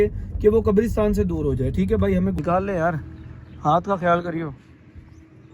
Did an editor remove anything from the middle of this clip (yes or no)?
yes